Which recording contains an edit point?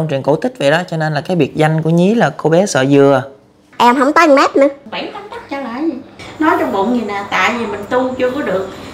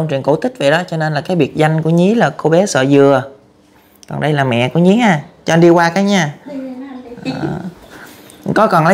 first; 3 cuts; at 3.7 s, 4.8 s, 6.2 s

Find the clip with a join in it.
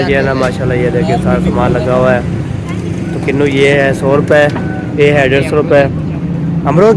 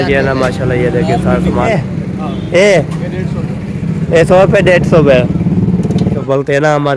second; 2 cuts; at 1.7 s, 6.2 s

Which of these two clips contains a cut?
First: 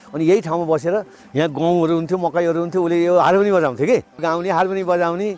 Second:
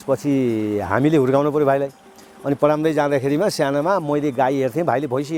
first; 1 cut; at 4.2 s

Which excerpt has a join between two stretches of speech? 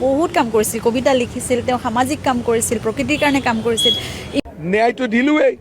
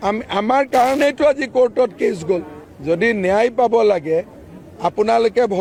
first; 1 cut; at 4.4 s

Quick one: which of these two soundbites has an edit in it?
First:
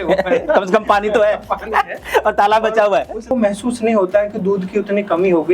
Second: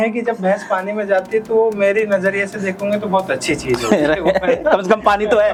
first; 1 cut; at 3.3 s

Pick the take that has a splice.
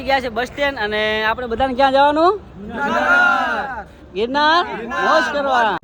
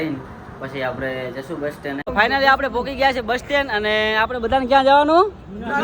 second; 1 cut; at 2.0 s

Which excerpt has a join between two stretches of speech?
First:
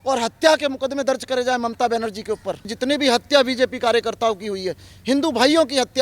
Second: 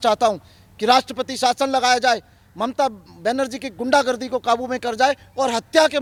first; 1 cut; at 2.7 s

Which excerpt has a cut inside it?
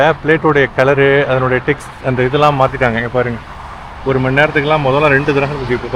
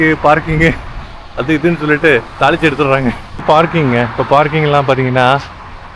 second; 1 cut; at 3.4 s

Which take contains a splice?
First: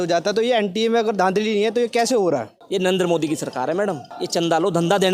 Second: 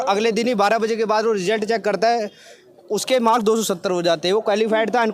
first; 2 cuts; at 2.6 s, 4.1 s

